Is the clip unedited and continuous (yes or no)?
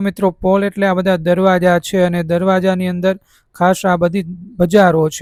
yes